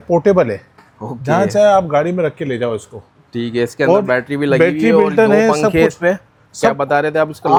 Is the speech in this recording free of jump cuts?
yes; 0 cuts

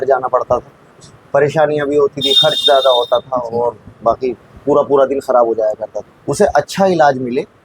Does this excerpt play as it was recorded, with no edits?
no; 1 cut; at 5.9 s

